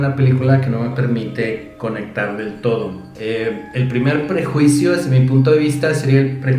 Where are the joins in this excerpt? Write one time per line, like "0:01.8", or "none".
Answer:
0:03.0